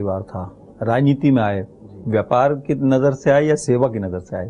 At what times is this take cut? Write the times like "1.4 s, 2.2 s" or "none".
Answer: none